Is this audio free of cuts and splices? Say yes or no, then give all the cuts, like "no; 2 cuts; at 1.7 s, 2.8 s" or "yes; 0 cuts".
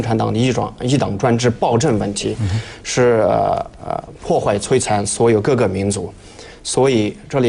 yes; 0 cuts